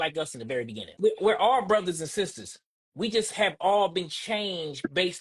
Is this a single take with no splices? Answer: no; 1 cut; at 0.9 s

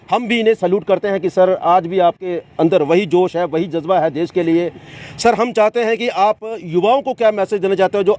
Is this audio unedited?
yes; 0 cuts

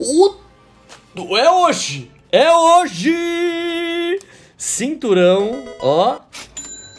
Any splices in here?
no; 0 cuts

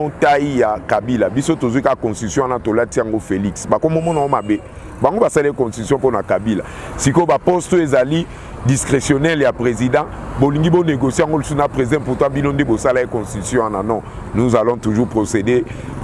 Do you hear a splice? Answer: no; 0 cuts

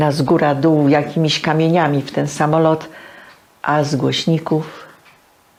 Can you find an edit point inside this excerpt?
no; 0 cuts

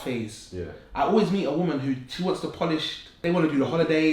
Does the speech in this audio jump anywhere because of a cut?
yes; 1 cut; at 3.1 s

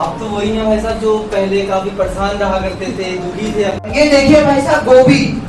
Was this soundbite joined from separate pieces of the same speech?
yes; 1 cut; at 3.8 s

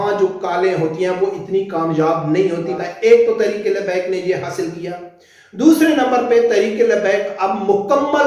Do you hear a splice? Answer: yes; 1 cut; at 2.8 s

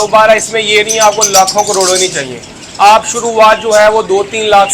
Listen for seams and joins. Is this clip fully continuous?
yes; 0 cuts

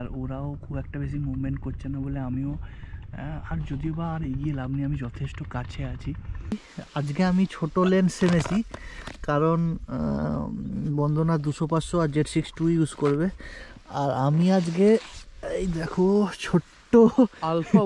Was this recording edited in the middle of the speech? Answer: yes; 1 cut; at 6.5 s

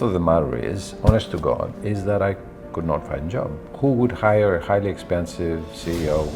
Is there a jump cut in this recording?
no; 0 cuts

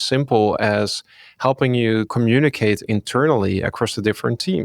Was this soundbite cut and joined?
yes; 1 cut; at 2.1 s

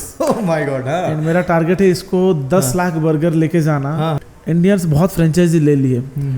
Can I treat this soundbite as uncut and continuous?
no; 1 cut; at 4.2 s

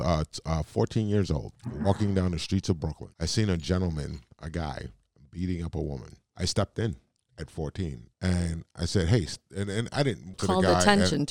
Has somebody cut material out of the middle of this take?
yes; 6 cuts; at 1.6 s, 3.0 s, 4.3 s, 6.2 s, 8.1 s, 10.3 s

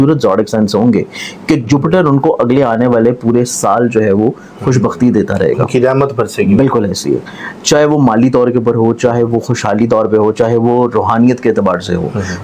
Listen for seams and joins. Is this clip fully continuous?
yes; 0 cuts

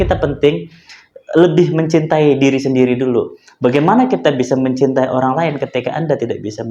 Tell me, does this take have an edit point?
no; 0 cuts

